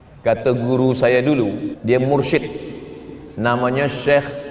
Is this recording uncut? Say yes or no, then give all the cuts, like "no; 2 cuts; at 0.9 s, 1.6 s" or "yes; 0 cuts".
no; 1 cut; at 1.7 s